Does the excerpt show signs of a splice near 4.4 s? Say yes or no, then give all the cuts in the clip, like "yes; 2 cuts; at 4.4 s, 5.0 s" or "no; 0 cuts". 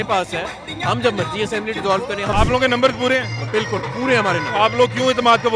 no; 1 cut; at 2.3 s